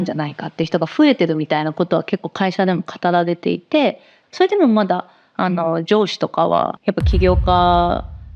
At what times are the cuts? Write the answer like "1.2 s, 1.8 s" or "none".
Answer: 4.1 s, 6.8 s